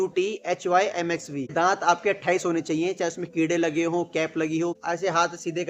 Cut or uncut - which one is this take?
cut